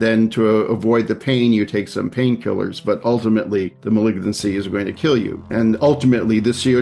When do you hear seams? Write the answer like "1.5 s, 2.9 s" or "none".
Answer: 3.7 s, 5.4 s

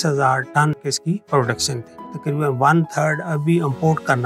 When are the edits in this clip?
0.8 s, 2.2 s

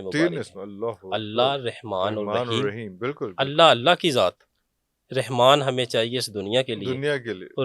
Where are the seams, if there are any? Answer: none

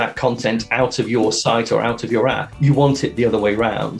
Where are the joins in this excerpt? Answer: 2.5 s

